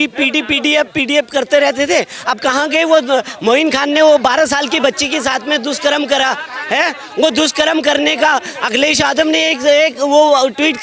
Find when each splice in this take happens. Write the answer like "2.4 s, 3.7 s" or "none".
none

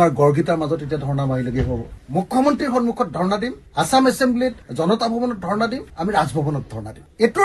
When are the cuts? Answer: 1.9 s

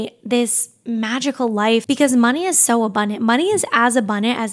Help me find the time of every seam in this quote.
1.8 s

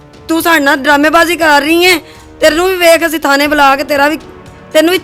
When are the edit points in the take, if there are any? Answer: none

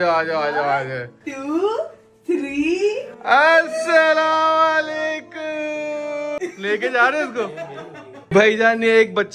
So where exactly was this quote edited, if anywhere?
6.4 s, 8.2 s

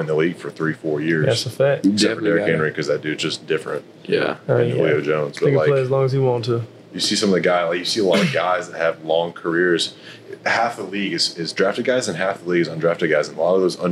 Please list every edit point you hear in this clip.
none

